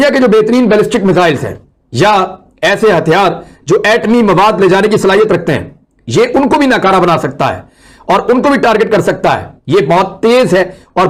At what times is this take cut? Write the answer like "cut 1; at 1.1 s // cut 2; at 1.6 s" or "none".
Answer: none